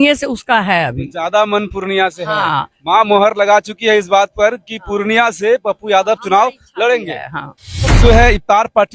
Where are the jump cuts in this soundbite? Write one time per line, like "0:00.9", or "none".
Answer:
0:08.0